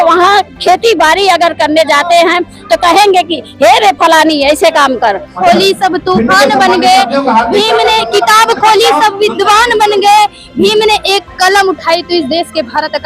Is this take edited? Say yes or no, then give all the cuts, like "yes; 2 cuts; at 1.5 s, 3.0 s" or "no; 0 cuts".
yes; 1 cut; at 5.4 s